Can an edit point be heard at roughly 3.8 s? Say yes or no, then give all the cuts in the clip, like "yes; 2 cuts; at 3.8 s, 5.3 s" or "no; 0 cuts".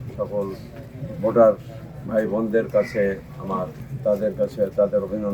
yes; 1 cut; at 3.8 s